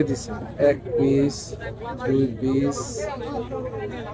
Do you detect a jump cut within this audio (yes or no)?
no